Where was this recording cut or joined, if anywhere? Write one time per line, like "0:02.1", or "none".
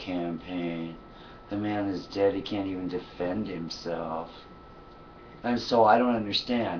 0:03.7